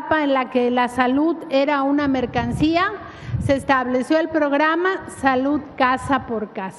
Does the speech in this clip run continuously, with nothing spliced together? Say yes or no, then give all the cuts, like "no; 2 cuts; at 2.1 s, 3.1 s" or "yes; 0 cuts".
yes; 0 cuts